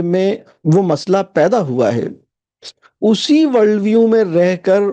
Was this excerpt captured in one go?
yes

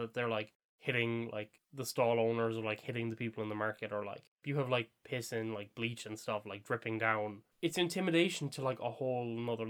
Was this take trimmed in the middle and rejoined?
yes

